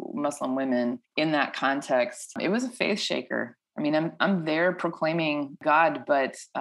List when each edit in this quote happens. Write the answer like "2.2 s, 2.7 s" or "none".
1.0 s, 2.4 s, 5.6 s